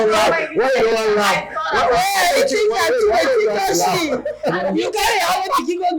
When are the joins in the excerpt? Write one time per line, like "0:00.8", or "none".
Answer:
none